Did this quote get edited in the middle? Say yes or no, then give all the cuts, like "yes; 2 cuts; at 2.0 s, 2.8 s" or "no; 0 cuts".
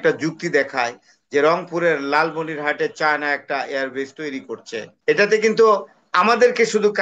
yes; 1 cut; at 4.9 s